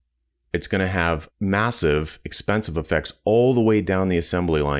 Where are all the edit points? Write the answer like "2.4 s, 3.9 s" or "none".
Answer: 1.3 s